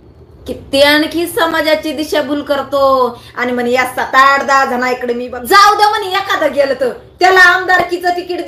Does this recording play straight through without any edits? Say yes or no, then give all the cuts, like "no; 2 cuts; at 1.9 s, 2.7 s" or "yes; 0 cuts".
no; 1 cut; at 5.3 s